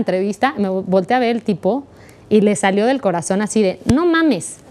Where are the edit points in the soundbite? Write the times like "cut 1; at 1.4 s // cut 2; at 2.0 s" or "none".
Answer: none